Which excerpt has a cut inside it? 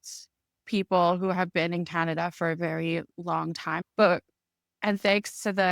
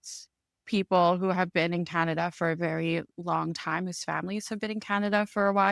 first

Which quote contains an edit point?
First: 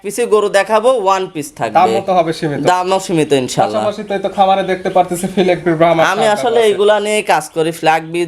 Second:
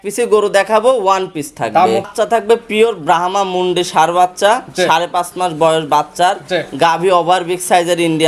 second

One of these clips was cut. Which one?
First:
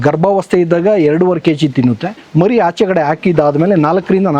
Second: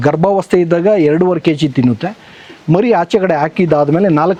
first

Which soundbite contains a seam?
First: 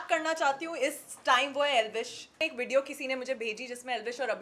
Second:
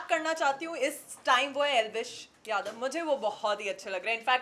first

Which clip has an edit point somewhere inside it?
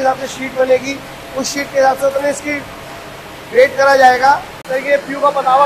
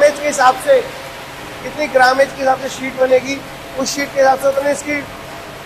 first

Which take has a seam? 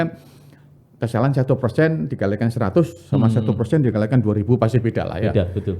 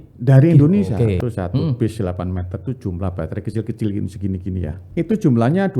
second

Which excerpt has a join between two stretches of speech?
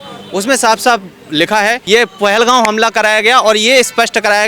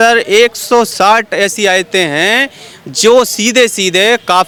first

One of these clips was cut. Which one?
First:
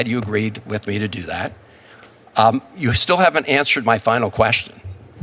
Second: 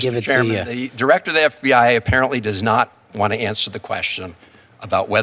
second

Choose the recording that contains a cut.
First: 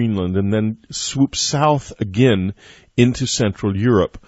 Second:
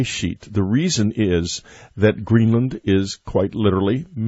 first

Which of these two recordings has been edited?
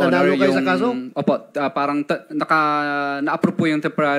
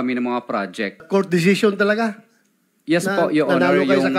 second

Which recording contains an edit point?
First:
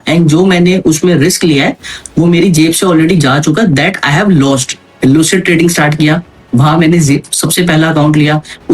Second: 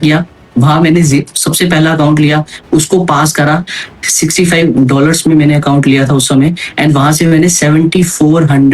first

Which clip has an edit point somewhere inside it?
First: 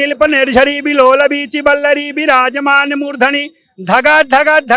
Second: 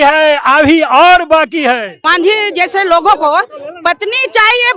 second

